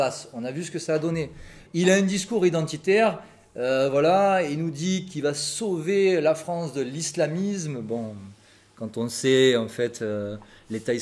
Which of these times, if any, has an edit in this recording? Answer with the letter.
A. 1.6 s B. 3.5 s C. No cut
A